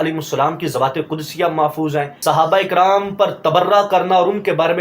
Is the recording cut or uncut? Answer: cut